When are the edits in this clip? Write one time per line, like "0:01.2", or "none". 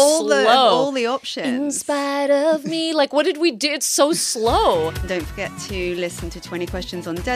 none